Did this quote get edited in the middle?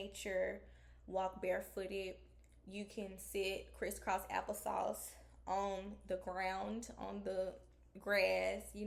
no; 0 cuts

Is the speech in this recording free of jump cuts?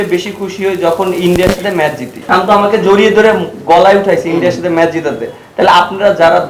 no; 1 cut; at 2.1 s

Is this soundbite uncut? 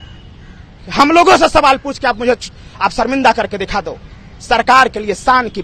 yes; 0 cuts

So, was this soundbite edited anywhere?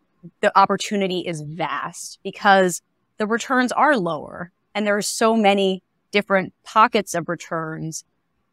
no; 0 cuts

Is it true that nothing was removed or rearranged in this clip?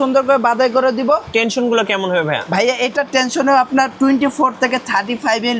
no; 1 cut; at 1.3 s

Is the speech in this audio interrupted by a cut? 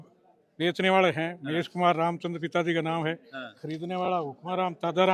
no; 0 cuts

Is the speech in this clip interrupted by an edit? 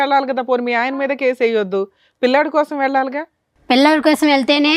no; 0 cuts

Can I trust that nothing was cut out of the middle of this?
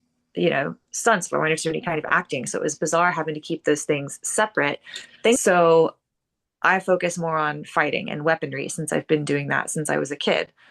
no; 1 cut; at 5.4 s

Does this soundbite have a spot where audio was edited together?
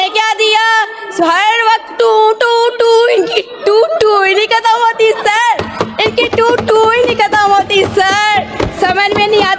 no; 0 cuts

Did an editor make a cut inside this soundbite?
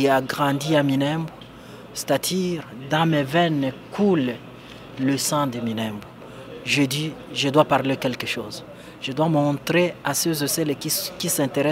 no; 0 cuts

